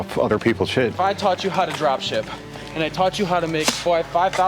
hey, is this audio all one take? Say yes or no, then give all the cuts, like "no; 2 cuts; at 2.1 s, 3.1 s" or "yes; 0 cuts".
no; 1 cut; at 0.9 s